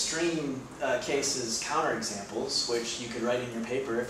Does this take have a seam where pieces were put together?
no; 0 cuts

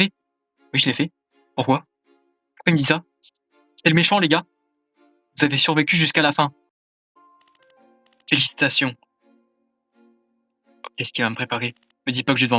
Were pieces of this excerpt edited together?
yes; 1 cut; at 7.1 s

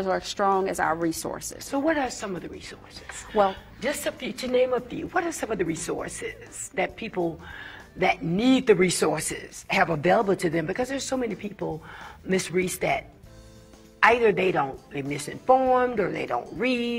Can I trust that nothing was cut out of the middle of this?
yes; 0 cuts

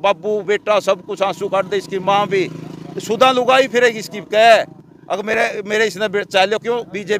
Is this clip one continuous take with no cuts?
yes; 0 cuts

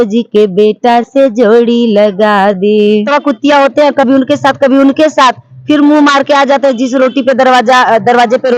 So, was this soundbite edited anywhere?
yes; 1 cut; at 3.1 s

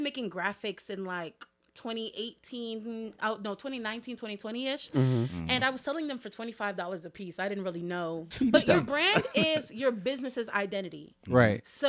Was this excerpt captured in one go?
no; 1 cut; at 8.3 s

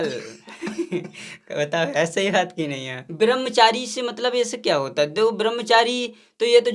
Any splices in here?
yes; 1 cut; at 3.0 s

